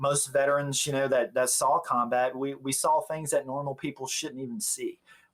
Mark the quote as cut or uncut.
uncut